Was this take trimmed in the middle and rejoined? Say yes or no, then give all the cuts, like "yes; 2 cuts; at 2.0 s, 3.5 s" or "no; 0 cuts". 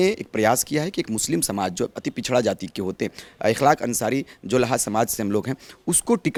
no; 0 cuts